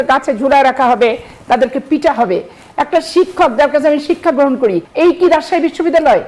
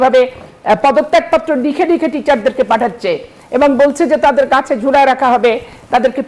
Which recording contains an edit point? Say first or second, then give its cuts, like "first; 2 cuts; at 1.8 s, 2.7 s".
first; 1 cut; at 4.9 s